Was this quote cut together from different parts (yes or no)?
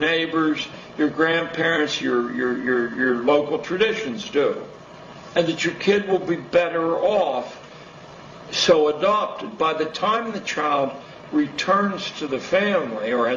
yes